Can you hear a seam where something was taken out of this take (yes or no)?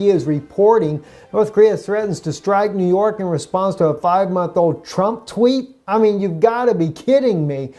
yes